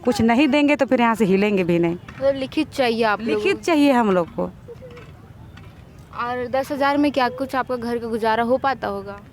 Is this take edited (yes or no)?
no